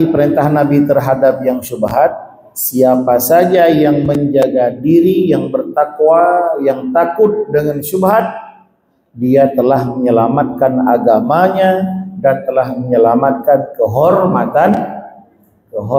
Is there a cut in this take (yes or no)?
no